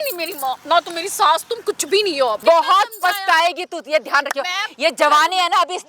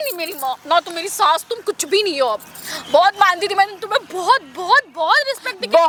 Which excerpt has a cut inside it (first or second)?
first